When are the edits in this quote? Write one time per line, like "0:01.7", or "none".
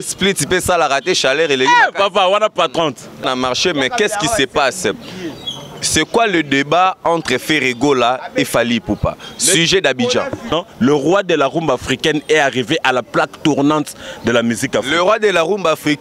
0:03.2
0:10.5